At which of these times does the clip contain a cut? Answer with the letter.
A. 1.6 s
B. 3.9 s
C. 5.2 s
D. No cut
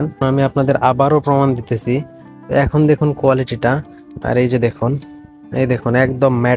D